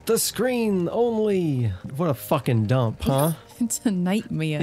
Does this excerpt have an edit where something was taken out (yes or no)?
yes